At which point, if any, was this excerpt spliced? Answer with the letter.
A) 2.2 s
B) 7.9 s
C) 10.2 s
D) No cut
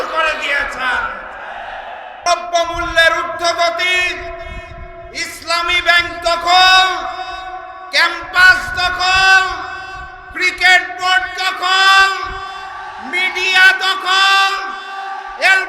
A